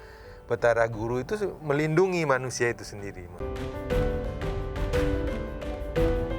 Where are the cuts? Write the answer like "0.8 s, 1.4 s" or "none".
3.4 s